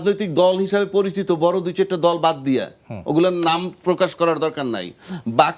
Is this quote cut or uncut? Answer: uncut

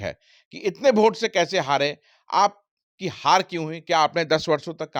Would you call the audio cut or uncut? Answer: uncut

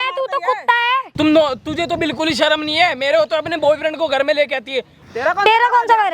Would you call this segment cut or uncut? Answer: cut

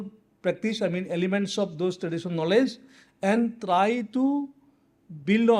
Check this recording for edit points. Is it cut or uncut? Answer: uncut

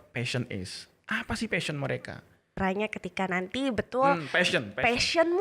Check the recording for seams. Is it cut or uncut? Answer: cut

